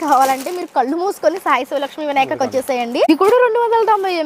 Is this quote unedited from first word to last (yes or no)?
no